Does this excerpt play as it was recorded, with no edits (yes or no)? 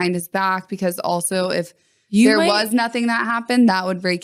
yes